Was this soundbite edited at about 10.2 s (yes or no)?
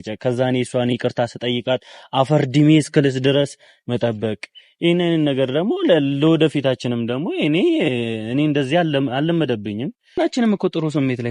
yes